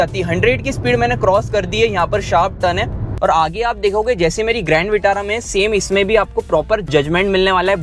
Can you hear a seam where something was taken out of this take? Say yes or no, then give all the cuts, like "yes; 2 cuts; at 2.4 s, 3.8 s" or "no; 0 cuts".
yes; 1 cut; at 3.1 s